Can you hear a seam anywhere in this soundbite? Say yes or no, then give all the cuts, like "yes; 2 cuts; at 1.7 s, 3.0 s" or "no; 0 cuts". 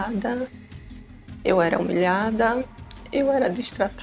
no; 0 cuts